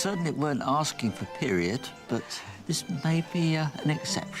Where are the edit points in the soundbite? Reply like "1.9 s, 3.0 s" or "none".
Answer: none